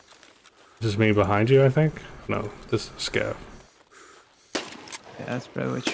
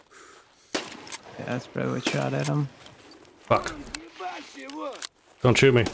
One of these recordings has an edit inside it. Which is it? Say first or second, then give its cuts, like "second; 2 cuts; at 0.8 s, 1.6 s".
second; 1 cut; at 3.4 s